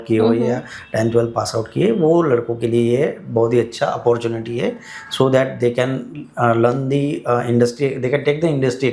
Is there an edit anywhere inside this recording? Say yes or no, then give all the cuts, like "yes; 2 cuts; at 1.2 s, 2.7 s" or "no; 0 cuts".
no; 0 cuts